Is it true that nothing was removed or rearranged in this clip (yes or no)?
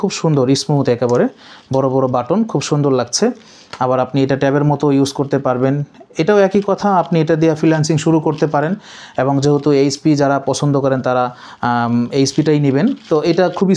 yes